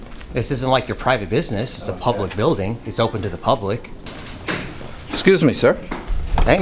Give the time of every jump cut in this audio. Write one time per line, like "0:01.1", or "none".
0:04.1